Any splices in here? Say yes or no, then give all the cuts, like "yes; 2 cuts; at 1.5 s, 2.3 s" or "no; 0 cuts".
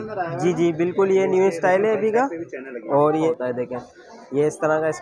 yes; 1 cut; at 3.3 s